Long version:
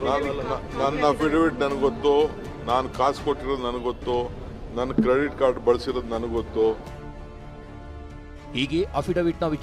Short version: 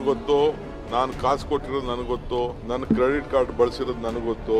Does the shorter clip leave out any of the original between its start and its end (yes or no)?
yes